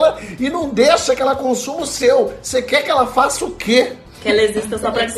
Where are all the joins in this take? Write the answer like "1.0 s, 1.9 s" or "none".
4.1 s